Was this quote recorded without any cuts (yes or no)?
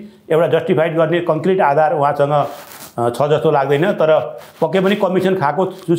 yes